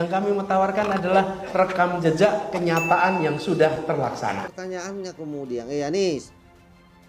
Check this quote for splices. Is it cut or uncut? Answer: cut